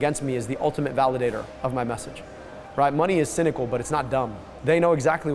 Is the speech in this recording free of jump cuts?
no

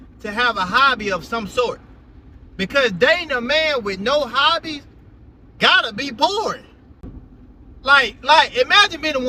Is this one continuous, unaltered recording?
yes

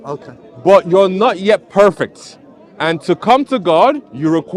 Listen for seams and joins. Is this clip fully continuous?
yes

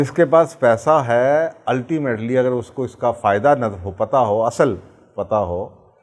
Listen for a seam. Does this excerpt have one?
no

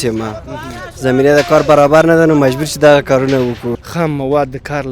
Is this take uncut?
no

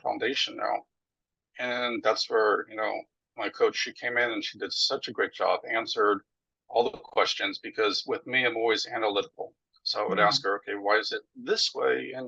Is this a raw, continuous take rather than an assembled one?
yes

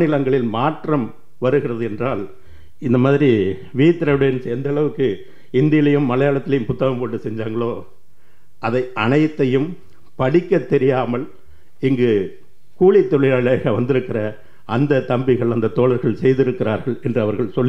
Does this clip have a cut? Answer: no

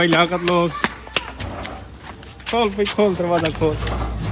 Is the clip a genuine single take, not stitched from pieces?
yes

